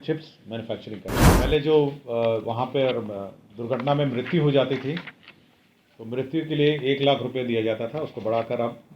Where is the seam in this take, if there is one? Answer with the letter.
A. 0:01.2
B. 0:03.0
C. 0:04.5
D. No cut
A